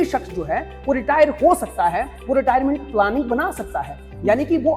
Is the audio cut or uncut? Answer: uncut